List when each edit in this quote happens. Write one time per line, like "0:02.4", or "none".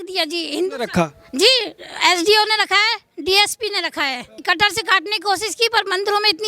0:04.4